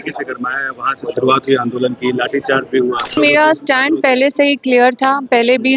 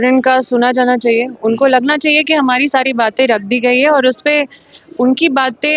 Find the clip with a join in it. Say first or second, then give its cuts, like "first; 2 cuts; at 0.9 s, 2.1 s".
first; 1 cut; at 3.2 s